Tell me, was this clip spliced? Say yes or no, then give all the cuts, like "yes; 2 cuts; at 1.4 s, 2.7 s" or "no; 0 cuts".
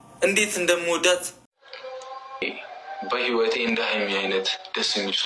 yes; 1 cut; at 1.3 s